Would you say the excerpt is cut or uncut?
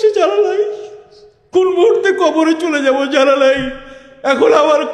uncut